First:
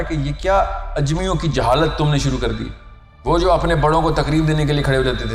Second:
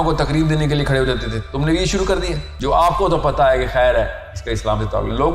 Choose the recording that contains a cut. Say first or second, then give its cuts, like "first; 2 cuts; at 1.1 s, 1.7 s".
second; 1 cut; at 2.5 s